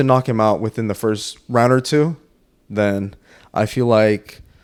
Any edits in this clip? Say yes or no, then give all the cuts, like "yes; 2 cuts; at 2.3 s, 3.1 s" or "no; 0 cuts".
no; 0 cuts